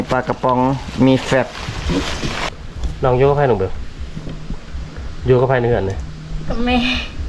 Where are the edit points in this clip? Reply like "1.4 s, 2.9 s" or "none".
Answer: 2.5 s

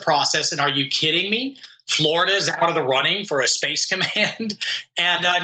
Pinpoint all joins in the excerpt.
none

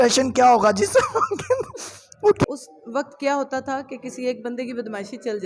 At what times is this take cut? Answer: 2.5 s

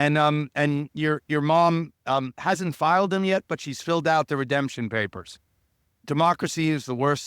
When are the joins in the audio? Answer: 6.0 s

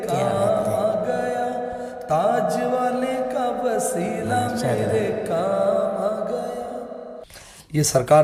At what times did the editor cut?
none

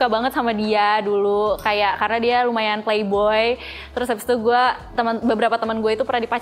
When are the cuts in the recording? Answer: none

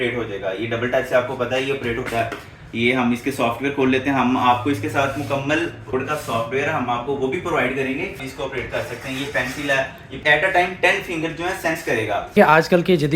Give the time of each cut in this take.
5.9 s, 8.3 s, 10.2 s, 12.3 s

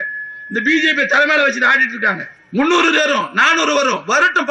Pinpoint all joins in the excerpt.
none

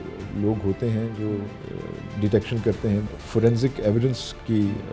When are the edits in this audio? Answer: 3.0 s

